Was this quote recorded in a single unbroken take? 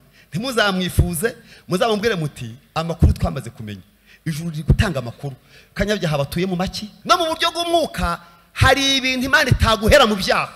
no; 1 cut; at 6.9 s

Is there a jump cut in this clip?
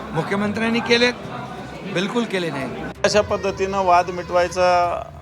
yes; 1 cut; at 2.9 s

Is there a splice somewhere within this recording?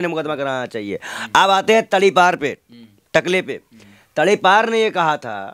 no; 0 cuts

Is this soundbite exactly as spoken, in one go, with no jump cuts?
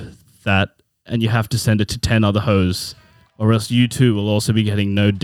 yes; 0 cuts

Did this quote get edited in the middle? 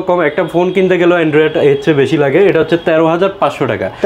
no; 0 cuts

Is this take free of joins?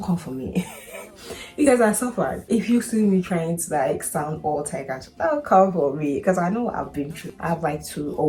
yes; 0 cuts

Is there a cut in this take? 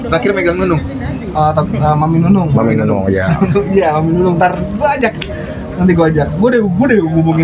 no; 0 cuts

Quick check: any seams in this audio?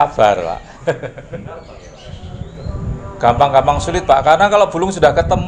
yes; 1 cut; at 1.5 s

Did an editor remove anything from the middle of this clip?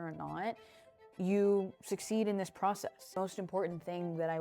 yes; 1 cut; at 3.1 s

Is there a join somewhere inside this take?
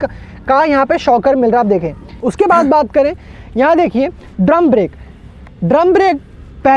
no; 0 cuts

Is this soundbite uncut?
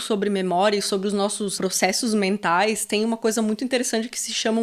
no; 1 cut; at 1.5 s

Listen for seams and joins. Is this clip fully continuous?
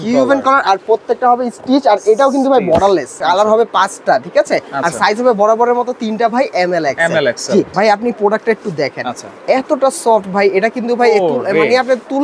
no; 2 cuts; at 3.2 s, 7.7 s

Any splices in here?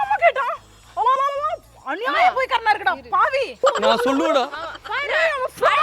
yes; 1 cut; at 3.6 s

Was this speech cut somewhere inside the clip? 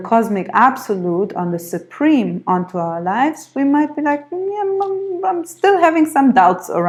no; 0 cuts

